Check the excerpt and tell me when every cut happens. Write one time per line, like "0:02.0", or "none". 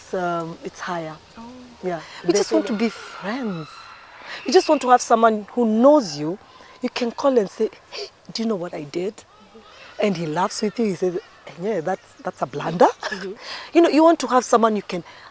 0:02.1